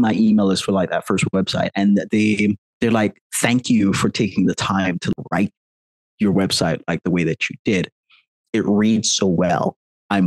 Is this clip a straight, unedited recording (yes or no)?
no